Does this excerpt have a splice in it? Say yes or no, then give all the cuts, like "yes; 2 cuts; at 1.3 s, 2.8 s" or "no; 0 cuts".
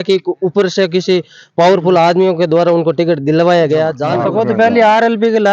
yes; 1 cut; at 4.1 s